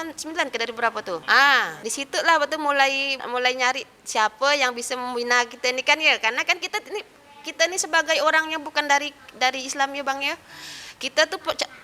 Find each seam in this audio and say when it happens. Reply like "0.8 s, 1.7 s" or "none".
1.2 s, 1.8 s, 3.2 s